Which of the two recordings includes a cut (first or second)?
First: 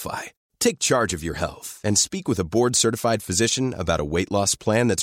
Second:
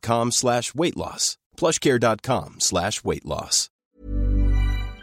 second